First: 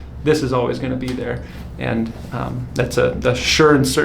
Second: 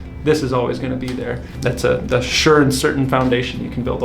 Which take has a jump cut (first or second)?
second